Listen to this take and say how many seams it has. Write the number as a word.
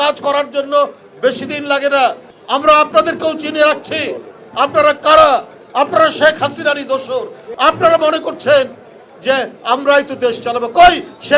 two